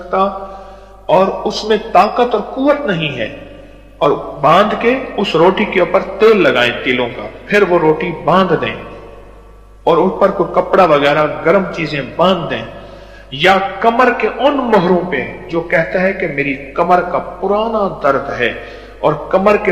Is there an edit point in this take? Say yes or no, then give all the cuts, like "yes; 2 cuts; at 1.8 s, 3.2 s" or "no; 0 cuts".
no; 0 cuts